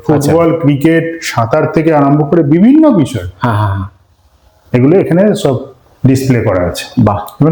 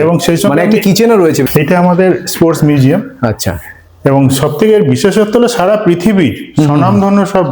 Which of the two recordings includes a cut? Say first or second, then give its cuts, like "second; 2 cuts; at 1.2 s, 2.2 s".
second; 1 cut; at 1.5 s